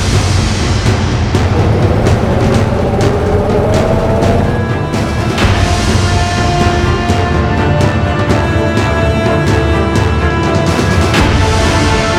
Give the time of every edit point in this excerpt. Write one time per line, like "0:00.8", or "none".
none

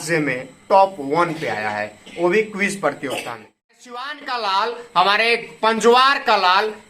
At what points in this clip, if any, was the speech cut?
0:03.7

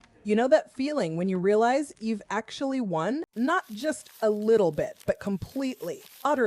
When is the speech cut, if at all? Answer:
0:03.3

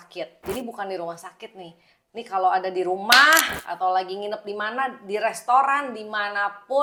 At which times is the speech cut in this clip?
none

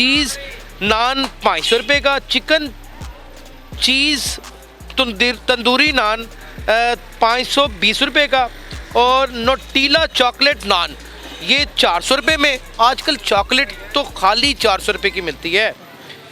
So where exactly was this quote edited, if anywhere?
none

